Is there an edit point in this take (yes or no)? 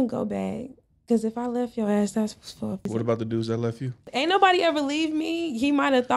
yes